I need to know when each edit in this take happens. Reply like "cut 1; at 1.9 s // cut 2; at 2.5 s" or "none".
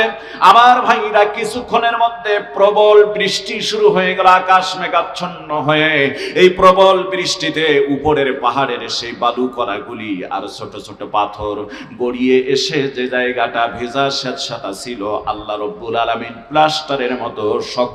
none

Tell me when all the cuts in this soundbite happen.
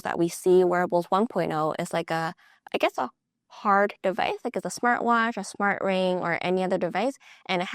cut 1; at 2.6 s

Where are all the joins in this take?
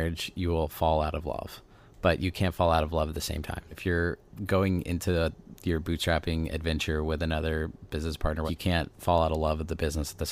cut 1; at 3.8 s // cut 2; at 5.5 s // cut 3; at 8.5 s

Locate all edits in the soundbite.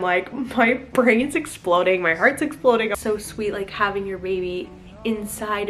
cut 1; at 3.0 s

